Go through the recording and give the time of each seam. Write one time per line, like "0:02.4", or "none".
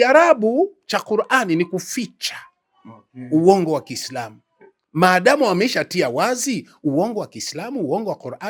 none